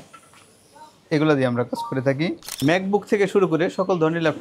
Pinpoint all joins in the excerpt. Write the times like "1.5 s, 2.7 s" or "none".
2.5 s

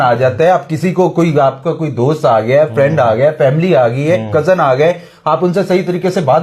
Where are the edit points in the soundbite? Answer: none

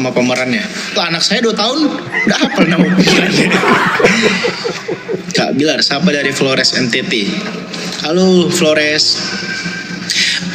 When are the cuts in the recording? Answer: none

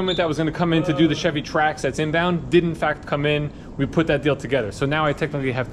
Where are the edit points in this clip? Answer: none

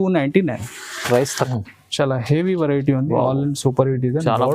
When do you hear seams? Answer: 1.5 s

